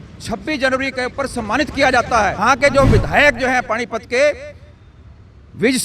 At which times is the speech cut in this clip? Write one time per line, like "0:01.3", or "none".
0:02.4